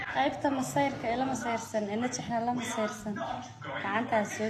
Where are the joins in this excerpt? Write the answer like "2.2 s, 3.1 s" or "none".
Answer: none